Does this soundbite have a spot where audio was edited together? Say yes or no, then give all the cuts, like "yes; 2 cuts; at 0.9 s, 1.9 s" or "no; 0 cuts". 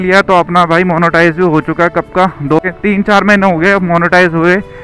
yes; 1 cut; at 2.6 s